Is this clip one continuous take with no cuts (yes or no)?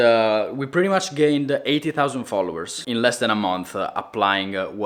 yes